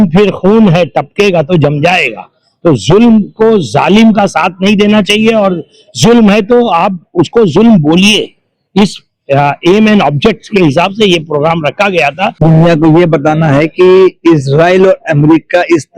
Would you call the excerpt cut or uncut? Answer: cut